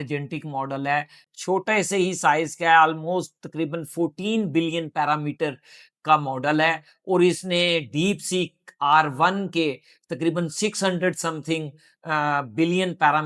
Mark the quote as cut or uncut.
uncut